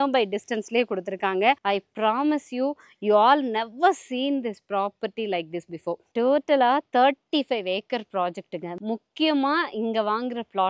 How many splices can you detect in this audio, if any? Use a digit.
3